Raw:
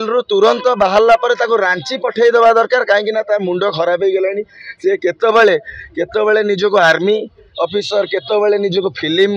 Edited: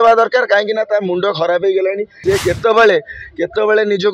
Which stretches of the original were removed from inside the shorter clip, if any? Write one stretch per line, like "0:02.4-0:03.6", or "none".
0:04.5-0:04.7